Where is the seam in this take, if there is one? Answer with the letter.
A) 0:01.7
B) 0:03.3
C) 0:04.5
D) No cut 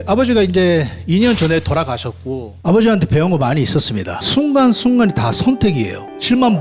D